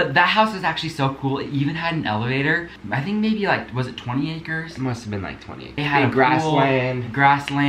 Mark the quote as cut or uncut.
cut